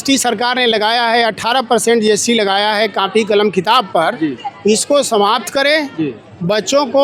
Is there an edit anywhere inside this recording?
no; 0 cuts

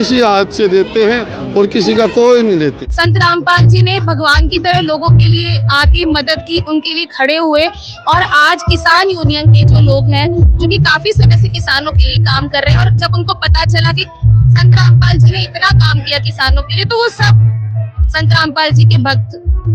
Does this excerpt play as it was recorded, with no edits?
no; 1 cut; at 2.8 s

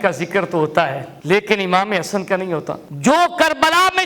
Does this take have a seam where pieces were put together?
yes; 1 cut; at 2.8 s

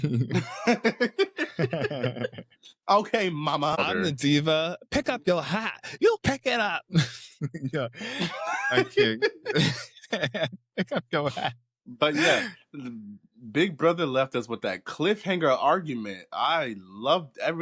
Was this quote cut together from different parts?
yes; 1 cut; at 3.8 s

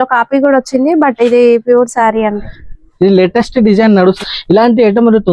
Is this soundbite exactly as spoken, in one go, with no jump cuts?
no; 1 cut; at 4.2 s

